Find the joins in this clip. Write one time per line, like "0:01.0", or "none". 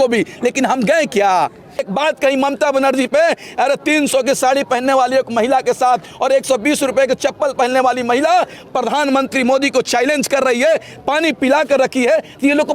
0:01.8